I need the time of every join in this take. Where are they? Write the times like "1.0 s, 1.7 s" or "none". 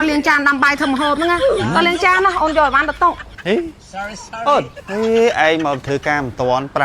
4.8 s